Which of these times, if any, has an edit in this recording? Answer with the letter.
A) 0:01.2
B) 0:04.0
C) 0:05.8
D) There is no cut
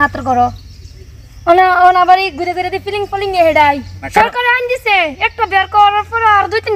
B